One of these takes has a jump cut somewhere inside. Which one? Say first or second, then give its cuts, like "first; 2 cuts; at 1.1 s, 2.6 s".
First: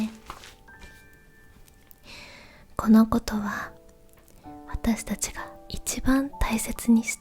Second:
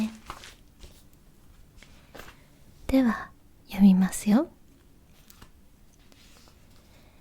first; 1 cut; at 1.6 s